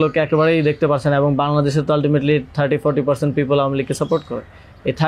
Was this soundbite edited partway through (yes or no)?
no